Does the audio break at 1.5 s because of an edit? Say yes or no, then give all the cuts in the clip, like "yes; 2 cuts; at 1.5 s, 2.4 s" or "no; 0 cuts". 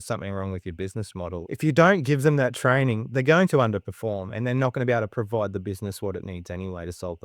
yes; 2 cuts; at 1.5 s, 3.1 s